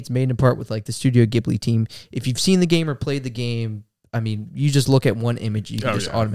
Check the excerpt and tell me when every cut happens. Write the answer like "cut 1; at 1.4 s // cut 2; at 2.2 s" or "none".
none